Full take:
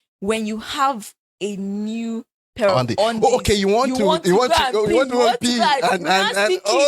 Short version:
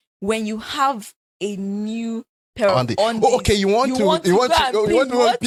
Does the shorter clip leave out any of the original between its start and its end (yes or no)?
no